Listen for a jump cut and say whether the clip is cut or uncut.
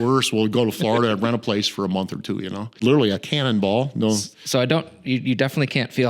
cut